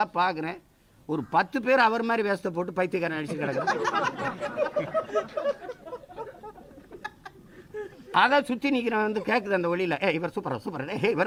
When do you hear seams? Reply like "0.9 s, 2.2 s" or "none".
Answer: none